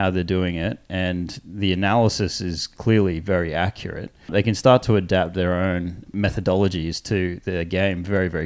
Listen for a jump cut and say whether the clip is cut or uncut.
cut